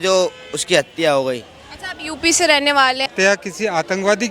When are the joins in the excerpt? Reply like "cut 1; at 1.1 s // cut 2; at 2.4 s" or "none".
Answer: cut 1; at 3.1 s